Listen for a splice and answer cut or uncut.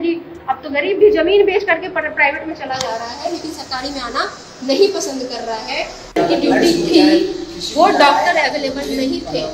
cut